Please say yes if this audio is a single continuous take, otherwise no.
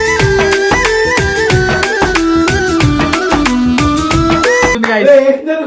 no